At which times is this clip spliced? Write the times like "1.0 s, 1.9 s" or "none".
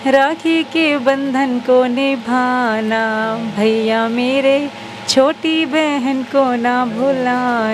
none